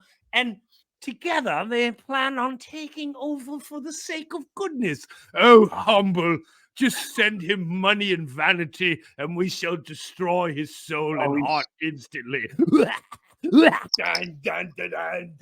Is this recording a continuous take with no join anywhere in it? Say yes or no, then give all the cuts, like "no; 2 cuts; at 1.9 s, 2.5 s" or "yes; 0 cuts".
no; 1 cut; at 13.8 s